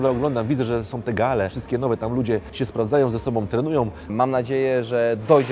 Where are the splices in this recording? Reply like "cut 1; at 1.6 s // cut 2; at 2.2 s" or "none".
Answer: cut 1; at 1.6 s // cut 2; at 2.5 s // cut 3; at 4.1 s